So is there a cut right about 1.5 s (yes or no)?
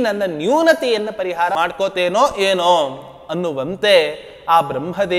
yes